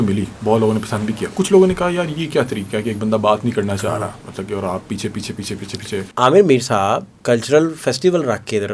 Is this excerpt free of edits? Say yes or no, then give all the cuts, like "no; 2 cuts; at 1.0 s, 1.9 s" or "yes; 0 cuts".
no; 2 cuts; at 6.1 s, 7.1 s